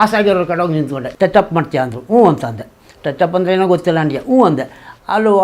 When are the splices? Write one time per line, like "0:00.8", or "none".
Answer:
0:01.0